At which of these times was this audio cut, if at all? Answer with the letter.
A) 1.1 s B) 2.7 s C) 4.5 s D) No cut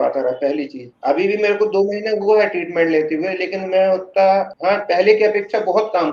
C